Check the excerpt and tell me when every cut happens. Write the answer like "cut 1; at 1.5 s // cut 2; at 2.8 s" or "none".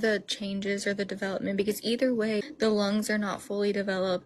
cut 1; at 2.4 s